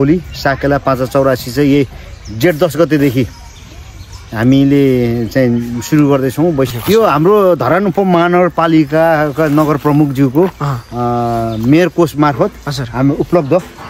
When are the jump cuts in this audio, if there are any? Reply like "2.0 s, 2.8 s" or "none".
6.8 s